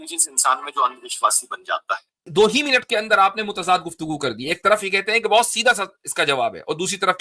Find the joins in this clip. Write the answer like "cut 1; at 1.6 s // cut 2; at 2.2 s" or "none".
cut 1; at 2.2 s